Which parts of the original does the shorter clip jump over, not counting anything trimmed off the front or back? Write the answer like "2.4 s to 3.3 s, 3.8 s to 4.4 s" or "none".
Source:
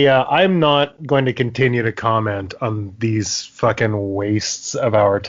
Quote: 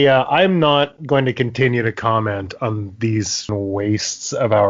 3.5 s to 3.9 s